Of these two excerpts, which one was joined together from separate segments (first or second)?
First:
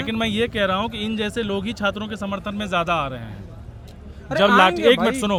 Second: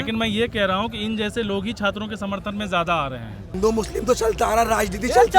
second